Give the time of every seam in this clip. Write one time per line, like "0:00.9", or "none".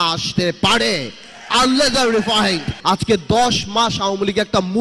0:02.7

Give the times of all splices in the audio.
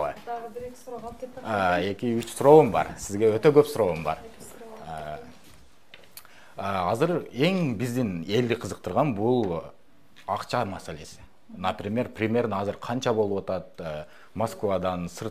none

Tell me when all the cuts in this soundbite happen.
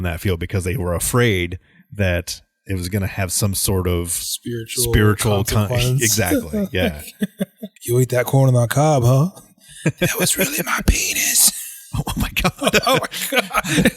0:07.7

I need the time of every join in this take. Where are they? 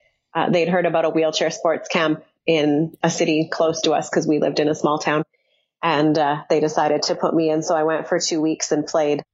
0:02.9

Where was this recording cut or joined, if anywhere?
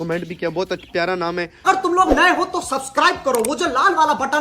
0:01.7

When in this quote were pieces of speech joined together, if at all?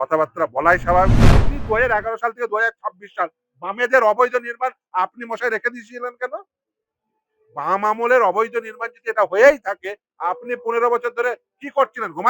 0:01.5

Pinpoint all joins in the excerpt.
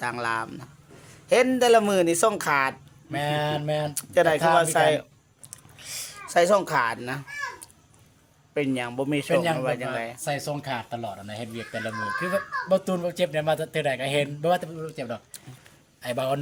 none

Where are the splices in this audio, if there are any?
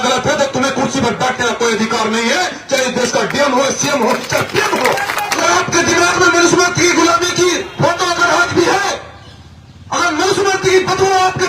0:05.4

